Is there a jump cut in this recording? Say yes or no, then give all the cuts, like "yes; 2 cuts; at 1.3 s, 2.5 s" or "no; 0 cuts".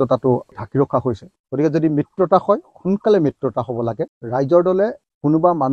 yes; 2 cuts; at 1.3 s, 4.1 s